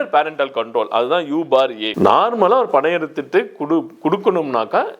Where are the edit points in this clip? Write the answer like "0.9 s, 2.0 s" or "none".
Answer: 1.8 s